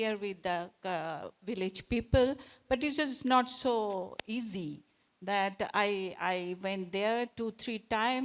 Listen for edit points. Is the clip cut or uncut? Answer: uncut